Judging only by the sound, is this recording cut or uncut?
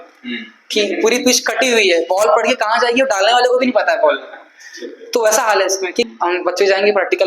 cut